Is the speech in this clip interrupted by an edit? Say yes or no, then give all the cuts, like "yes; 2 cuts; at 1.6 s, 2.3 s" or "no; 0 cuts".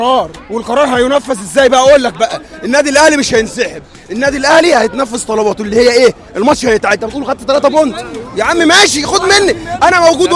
no; 0 cuts